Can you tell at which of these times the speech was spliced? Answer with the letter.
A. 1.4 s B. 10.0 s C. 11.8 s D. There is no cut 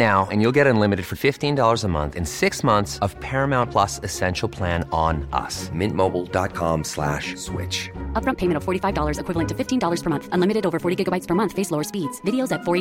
D